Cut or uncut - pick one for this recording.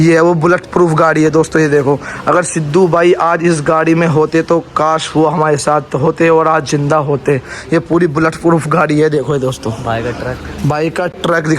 uncut